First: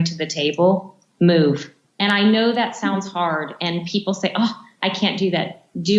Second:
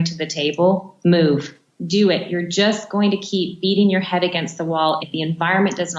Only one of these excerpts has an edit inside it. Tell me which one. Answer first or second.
second